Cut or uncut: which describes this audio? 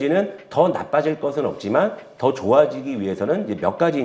uncut